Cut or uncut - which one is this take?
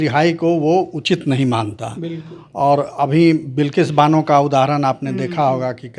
uncut